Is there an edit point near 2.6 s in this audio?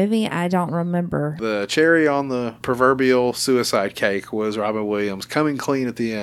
yes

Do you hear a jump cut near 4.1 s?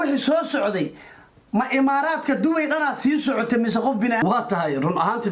no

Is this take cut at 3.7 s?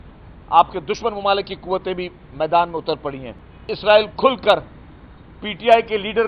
yes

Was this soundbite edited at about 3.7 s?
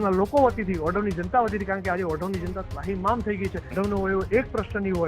yes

